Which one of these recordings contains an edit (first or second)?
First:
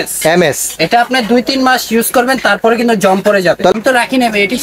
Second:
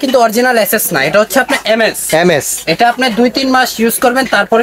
first